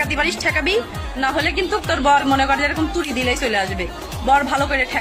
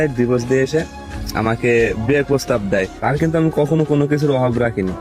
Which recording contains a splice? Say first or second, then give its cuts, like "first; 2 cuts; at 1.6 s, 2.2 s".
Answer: second; 1 cut; at 2.9 s